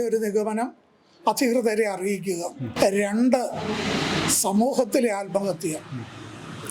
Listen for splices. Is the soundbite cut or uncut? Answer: cut